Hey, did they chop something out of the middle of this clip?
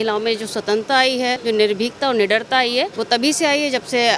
yes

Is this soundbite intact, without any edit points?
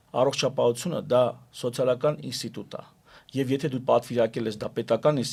yes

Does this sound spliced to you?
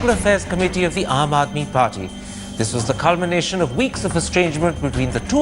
yes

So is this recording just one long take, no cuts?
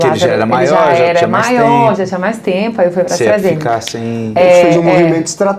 yes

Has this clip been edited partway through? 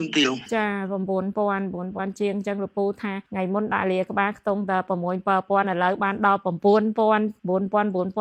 no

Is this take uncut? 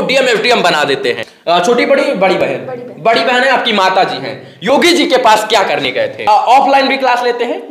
no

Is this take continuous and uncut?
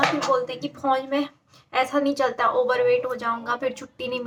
yes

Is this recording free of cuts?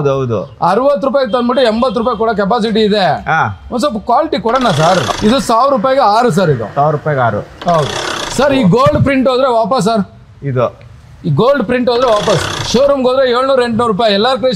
no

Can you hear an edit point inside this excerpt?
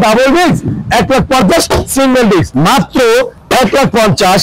yes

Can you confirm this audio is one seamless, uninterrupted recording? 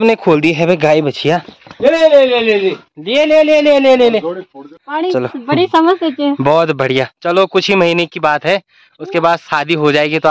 no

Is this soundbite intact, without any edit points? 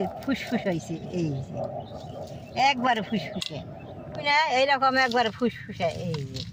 yes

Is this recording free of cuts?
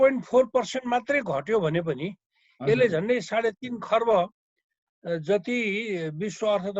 yes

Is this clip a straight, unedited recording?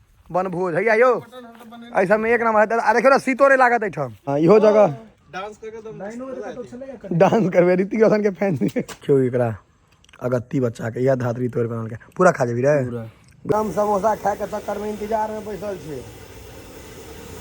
no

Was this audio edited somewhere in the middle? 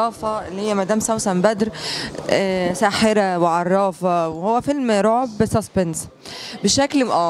no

